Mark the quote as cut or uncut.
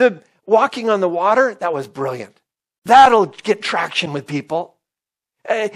cut